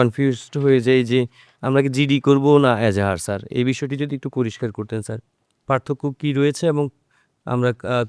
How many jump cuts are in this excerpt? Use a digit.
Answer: 0